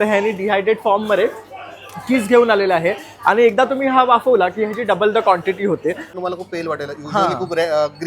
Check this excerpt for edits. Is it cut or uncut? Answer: cut